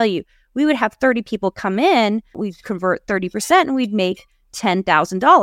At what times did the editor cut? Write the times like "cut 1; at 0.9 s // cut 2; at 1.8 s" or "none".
cut 1; at 2.4 s